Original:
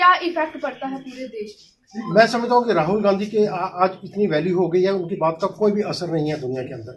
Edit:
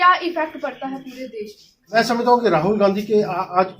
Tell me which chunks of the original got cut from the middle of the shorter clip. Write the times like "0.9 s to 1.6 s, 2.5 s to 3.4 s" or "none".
2.0 s to 2.2 s